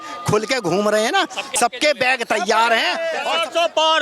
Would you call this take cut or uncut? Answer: cut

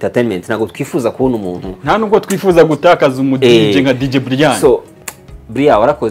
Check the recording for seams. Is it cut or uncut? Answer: cut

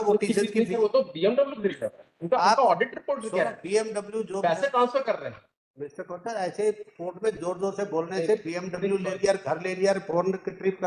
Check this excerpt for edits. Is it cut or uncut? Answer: uncut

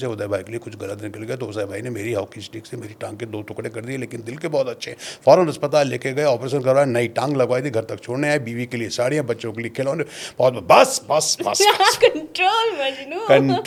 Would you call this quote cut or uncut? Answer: uncut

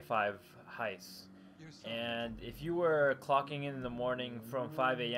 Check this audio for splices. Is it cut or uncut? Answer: cut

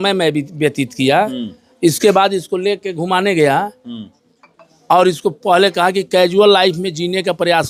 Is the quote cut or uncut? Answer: uncut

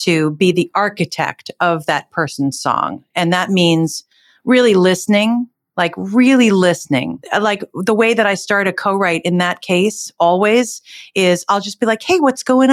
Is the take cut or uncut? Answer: cut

